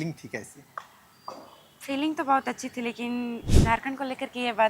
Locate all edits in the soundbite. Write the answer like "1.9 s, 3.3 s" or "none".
3.4 s